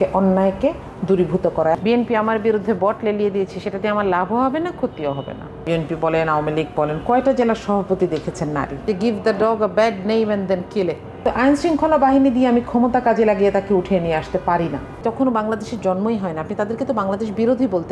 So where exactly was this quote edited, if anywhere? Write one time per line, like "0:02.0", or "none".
0:01.8
0:05.6
0:08.8
0:11.2
0:15.0